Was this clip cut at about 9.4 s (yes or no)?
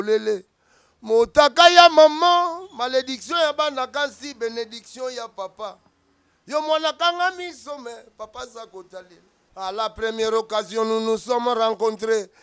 yes